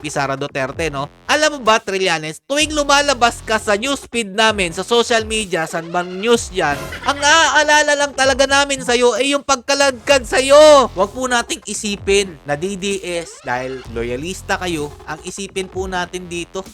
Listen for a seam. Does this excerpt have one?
yes; 3 cuts; at 6.9 s, 10.9 s, 13.6 s

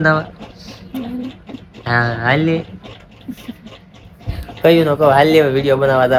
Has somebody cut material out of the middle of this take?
no; 0 cuts

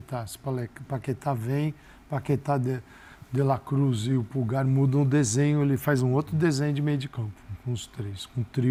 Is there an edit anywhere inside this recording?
no; 0 cuts

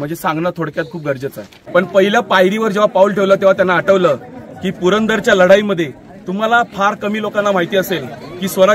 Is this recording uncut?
no; 1 cut; at 1.6 s

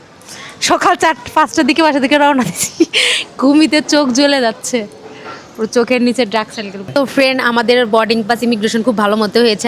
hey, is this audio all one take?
no; 1 cut; at 6.9 s

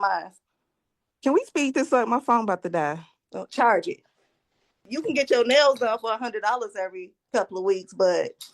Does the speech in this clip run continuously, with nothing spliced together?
no; 1 cut; at 4.8 s

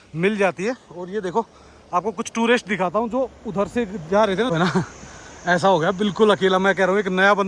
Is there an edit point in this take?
yes; 1 cut; at 4.5 s

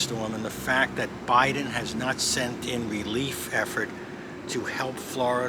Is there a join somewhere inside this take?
no; 0 cuts

